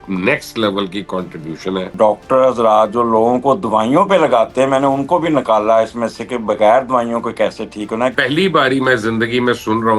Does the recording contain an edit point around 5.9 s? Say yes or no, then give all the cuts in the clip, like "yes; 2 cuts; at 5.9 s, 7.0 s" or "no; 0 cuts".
no; 2 cuts; at 1.9 s, 8.1 s